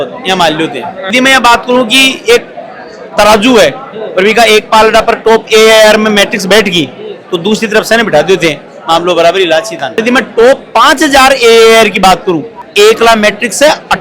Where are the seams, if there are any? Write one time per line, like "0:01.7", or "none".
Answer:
0:01.0
0:10.0